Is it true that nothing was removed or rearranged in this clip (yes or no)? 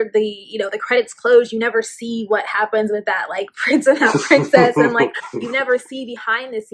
no